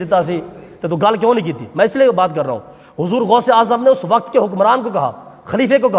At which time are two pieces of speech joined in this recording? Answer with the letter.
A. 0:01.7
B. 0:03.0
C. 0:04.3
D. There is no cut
D